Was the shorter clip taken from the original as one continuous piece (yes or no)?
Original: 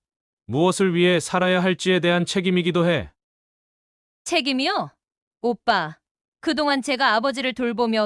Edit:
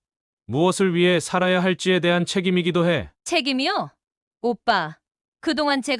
no